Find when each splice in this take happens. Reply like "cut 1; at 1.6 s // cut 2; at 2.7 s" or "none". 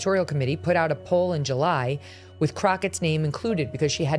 none